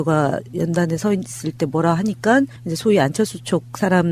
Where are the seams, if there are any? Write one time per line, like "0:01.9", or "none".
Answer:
0:02.4